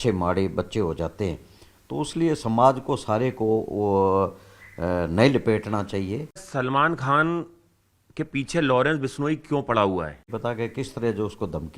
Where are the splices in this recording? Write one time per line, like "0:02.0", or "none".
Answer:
0:06.4
0:10.3